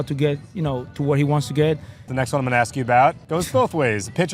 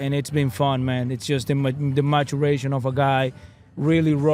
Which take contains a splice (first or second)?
first